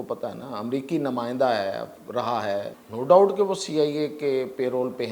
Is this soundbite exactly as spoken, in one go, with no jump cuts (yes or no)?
no